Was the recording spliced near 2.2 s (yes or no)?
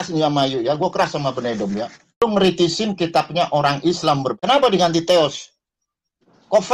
yes